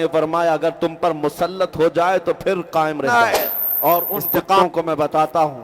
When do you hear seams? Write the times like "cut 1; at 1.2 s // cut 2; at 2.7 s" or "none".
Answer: cut 1; at 3.1 s